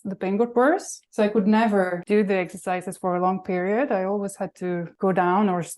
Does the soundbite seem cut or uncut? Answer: cut